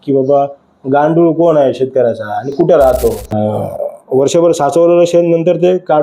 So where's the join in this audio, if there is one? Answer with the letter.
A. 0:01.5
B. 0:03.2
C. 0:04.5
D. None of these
B